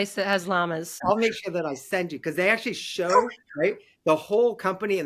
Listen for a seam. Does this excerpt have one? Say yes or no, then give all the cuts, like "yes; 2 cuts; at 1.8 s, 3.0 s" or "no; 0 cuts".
yes; 1 cut; at 1.0 s